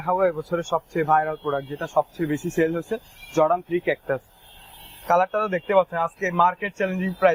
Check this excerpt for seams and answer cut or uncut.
uncut